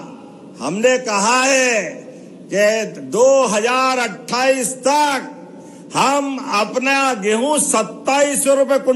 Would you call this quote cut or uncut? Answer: uncut